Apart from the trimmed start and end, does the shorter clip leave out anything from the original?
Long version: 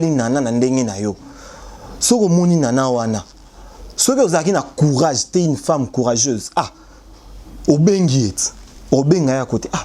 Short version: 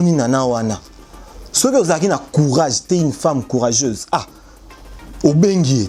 no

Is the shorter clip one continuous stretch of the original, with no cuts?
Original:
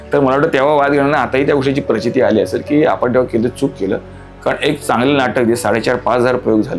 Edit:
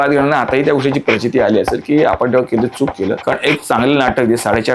no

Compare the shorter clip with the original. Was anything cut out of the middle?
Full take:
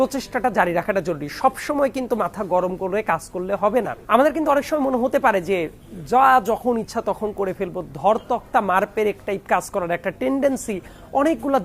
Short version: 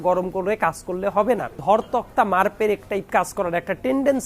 yes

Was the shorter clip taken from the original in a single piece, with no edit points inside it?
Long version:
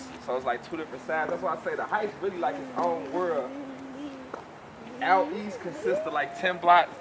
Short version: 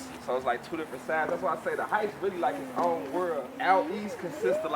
no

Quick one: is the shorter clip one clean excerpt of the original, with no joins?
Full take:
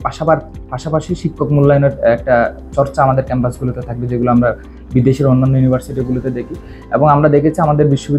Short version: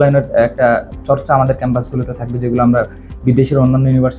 yes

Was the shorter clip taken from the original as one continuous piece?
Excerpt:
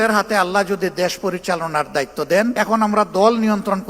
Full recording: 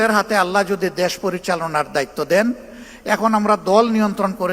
no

